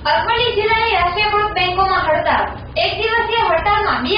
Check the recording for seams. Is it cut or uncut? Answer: uncut